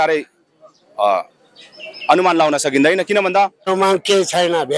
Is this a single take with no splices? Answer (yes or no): no